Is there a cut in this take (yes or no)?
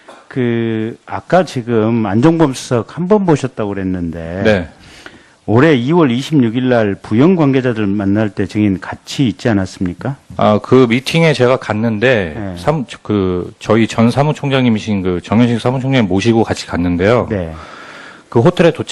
yes